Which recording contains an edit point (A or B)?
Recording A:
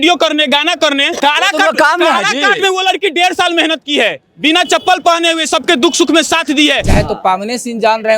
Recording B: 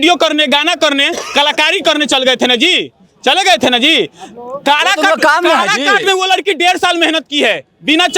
A